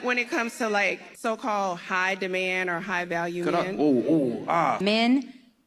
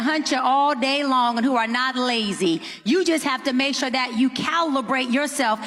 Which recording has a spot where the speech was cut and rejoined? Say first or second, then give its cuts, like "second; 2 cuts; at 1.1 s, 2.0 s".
first; 1 cut; at 3.8 s